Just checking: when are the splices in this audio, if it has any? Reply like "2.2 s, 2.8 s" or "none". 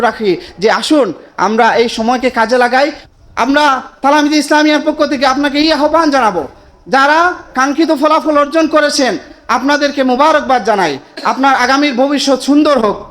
3.0 s